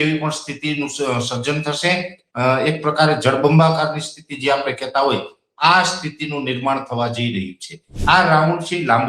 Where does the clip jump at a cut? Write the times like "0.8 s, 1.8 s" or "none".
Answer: 7.8 s